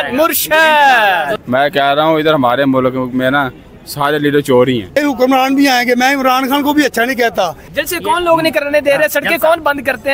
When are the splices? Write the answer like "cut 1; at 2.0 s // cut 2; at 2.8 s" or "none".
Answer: cut 1; at 1.3 s // cut 2; at 4.9 s // cut 3; at 7.6 s